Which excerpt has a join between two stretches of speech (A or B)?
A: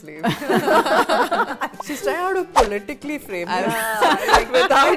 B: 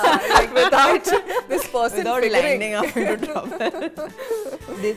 A